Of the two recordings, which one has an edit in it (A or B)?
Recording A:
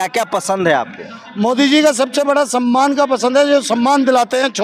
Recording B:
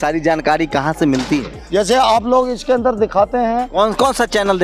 B